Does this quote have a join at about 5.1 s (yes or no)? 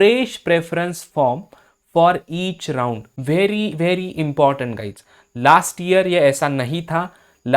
no